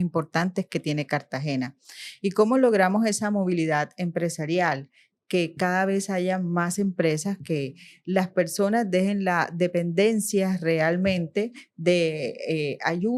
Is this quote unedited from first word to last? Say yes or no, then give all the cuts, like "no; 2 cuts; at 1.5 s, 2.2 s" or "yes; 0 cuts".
yes; 0 cuts